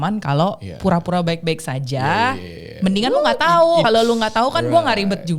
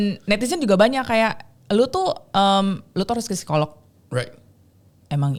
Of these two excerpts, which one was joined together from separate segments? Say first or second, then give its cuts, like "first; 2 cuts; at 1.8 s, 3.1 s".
first; 1 cut; at 3.8 s